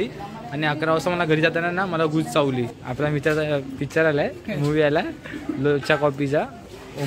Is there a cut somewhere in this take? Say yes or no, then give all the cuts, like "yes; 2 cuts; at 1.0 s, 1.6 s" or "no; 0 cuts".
yes; 1 cut; at 2.8 s